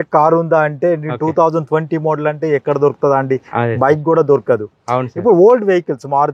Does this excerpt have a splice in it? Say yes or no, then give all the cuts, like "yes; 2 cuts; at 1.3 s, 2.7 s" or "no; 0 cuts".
no; 0 cuts